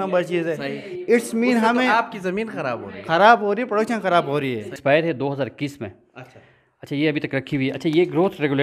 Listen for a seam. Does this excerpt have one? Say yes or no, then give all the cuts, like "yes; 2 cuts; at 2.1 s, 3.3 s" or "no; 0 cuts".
yes; 1 cut; at 4.7 s